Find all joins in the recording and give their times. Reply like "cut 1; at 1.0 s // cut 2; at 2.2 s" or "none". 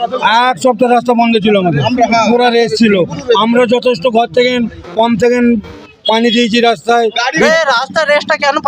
cut 1; at 7.3 s